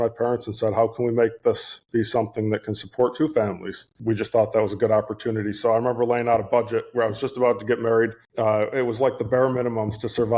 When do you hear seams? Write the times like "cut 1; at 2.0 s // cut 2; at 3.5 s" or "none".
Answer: cut 1; at 3.9 s // cut 2; at 8.2 s